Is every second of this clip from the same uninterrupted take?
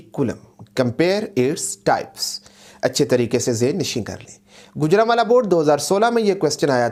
yes; 0 cuts

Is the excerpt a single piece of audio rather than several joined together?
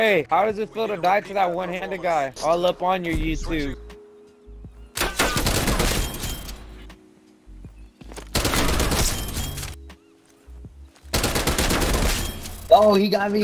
yes; 0 cuts

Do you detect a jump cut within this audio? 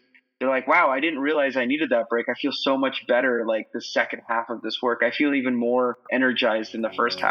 no; 0 cuts

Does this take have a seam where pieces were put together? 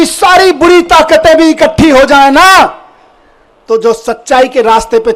no; 0 cuts

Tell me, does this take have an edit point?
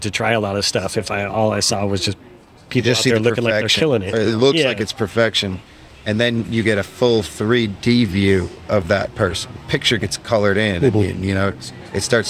yes; 1 cut; at 9.6 s

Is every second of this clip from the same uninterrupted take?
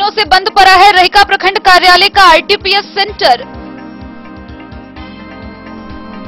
yes; 0 cuts

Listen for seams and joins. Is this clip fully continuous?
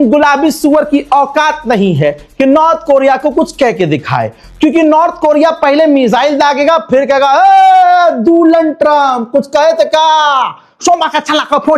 yes; 0 cuts

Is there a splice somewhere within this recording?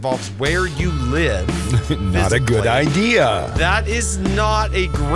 no; 0 cuts

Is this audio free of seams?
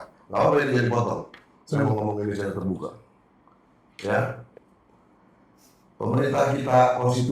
yes; 0 cuts

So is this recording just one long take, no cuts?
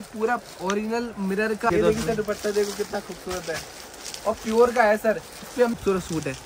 no; 2 cuts; at 1.7 s, 5.7 s

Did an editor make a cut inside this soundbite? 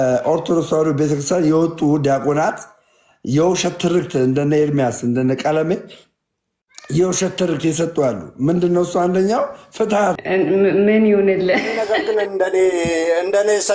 yes; 1 cut; at 10.2 s

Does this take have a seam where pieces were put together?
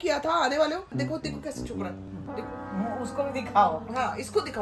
no; 0 cuts

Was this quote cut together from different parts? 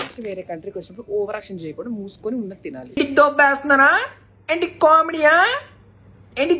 no; 0 cuts

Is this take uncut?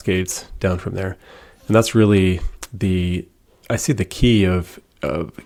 yes; 0 cuts

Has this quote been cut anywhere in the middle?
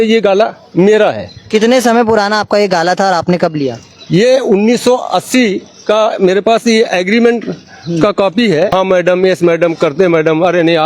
yes; 1 cut; at 8.7 s

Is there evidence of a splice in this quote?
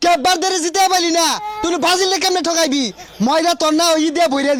no; 0 cuts

